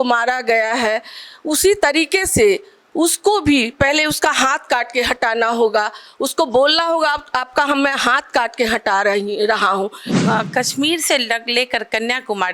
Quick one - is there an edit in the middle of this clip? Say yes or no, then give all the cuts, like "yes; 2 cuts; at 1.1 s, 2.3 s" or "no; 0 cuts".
yes; 1 cut; at 10.0 s